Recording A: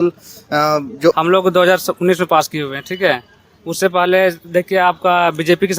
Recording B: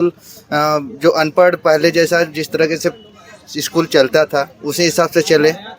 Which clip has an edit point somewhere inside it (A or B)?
A